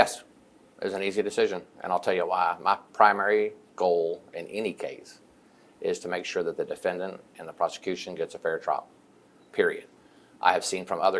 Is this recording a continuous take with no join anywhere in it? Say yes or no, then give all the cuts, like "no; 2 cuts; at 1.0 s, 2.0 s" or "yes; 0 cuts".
yes; 0 cuts